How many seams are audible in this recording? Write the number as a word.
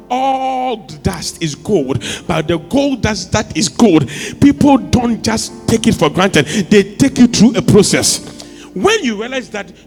zero